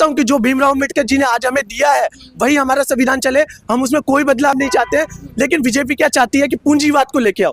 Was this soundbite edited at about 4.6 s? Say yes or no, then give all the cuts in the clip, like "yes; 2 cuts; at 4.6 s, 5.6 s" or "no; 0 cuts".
no; 0 cuts